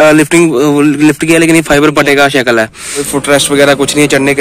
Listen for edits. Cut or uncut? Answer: cut